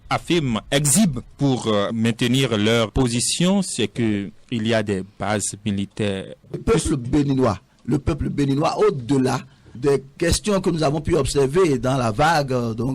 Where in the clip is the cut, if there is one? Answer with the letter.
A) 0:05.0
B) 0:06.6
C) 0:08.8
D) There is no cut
B